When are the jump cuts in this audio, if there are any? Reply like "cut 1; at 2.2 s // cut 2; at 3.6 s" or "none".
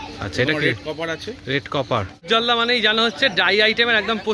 cut 1; at 2.2 s